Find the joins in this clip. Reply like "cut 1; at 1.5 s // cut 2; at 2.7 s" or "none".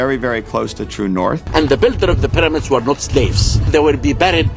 cut 1; at 1.4 s